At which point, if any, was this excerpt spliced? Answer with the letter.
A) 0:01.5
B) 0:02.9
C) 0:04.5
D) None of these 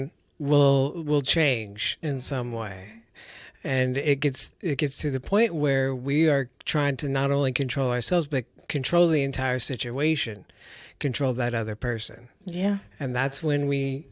D